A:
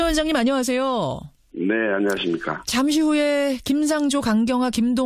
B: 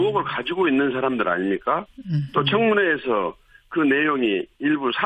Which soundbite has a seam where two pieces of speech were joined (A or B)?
A